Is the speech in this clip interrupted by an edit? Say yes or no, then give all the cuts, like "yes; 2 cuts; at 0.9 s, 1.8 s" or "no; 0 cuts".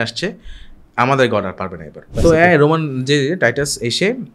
yes; 1 cut; at 2.1 s